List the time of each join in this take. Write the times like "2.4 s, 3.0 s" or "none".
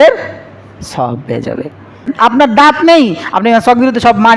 2.1 s